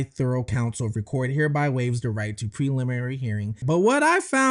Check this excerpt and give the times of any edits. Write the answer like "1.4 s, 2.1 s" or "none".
3.6 s